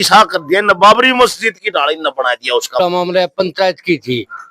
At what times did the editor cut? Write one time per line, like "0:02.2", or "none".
0:02.8